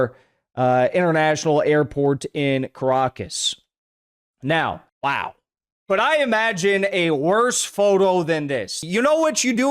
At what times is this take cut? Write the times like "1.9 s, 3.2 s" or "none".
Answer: 8.8 s

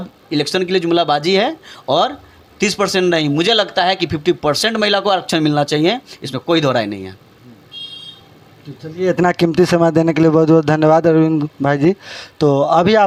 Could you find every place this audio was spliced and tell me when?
none

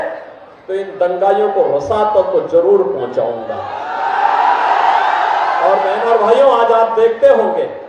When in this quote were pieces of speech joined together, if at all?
none

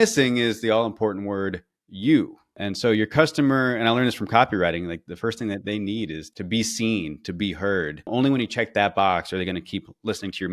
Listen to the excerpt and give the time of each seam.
2.6 s, 5.0 s, 6.2 s, 8.1 s

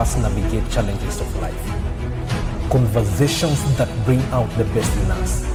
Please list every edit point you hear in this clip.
none

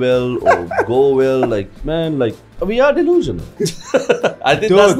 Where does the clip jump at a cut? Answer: 1.7 s, 2.5 s, 3.4 s

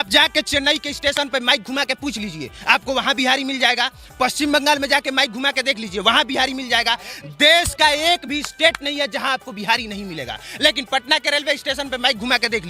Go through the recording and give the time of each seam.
none

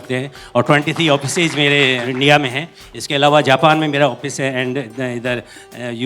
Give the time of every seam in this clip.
2.0 s

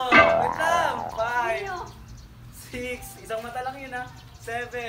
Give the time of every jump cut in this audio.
1.1 s

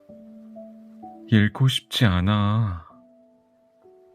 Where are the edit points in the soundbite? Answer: 1.0 s, 3.1 s

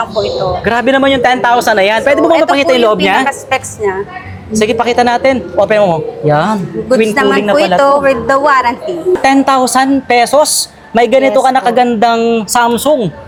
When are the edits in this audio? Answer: none

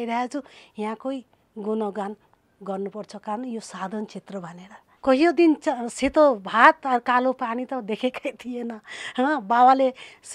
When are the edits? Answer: 4.9 s

